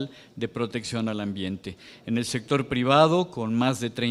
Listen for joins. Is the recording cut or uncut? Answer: uncut